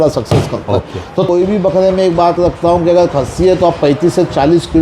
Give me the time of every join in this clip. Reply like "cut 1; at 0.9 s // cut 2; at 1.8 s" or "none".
cut 1; at 1.3 s